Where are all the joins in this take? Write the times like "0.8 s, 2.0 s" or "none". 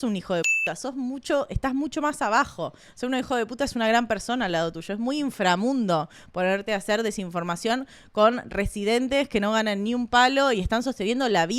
none